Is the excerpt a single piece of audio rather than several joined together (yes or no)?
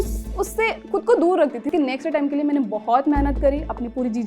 no